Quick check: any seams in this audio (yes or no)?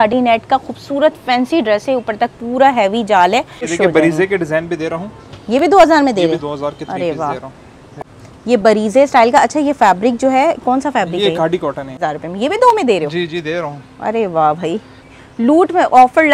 yes